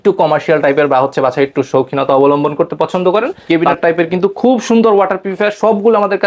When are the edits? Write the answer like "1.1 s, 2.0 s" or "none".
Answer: 3.4 s